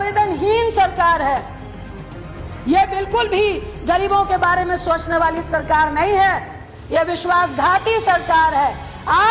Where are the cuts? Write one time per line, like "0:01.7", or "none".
none